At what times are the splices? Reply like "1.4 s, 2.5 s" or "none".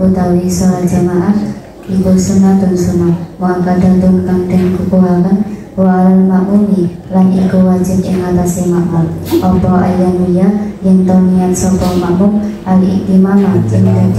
none